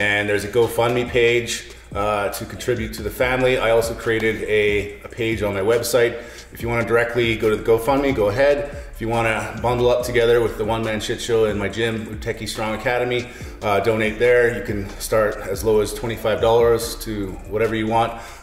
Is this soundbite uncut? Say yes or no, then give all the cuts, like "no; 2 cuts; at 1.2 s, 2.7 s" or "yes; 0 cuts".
yes; 0 cuts